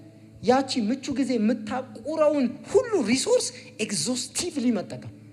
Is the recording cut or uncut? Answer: uncut